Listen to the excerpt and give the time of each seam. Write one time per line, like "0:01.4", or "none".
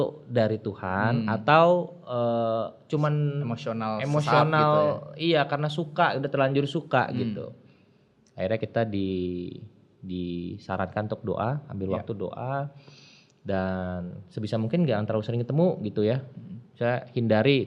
none